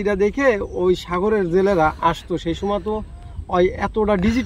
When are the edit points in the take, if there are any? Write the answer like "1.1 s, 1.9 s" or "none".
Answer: none